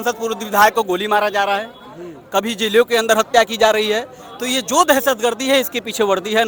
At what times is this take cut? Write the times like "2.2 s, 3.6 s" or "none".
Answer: none